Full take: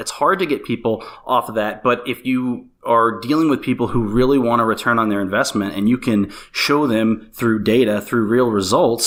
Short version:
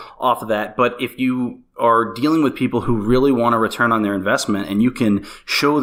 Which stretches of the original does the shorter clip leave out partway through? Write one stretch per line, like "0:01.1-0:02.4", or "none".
none